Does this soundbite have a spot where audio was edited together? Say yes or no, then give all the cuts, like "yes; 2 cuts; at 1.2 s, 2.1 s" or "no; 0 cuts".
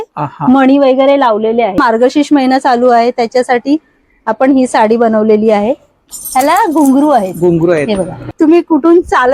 yes; 3 cuts; at 1.8 s, 6.1 s, 8.3 s